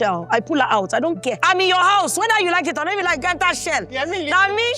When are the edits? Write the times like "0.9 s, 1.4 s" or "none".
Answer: 1.4 s